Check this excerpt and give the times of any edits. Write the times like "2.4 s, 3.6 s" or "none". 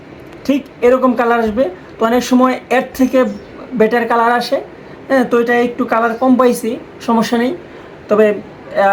none